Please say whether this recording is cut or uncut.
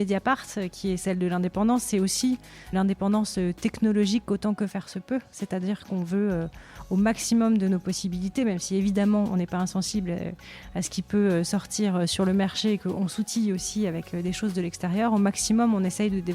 cut